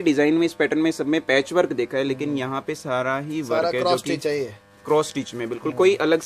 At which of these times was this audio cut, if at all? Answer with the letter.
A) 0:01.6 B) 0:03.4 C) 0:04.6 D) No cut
D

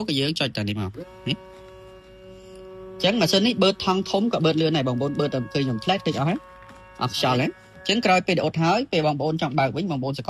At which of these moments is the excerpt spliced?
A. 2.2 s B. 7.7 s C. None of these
B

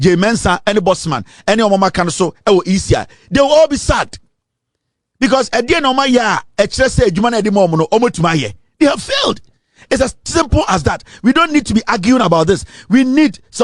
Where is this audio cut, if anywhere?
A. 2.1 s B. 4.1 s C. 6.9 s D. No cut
D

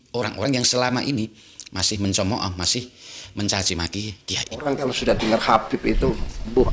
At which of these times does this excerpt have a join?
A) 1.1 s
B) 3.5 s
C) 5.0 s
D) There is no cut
C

